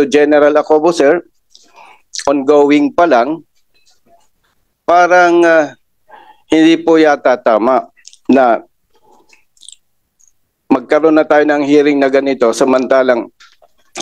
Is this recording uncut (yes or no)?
yes